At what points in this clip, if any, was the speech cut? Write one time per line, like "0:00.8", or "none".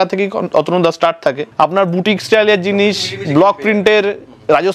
0:01.4